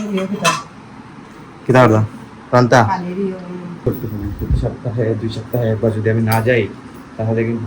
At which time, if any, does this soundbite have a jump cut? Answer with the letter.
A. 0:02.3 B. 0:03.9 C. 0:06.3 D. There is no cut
B